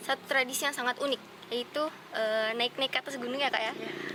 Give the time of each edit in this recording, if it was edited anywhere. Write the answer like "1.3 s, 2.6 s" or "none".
none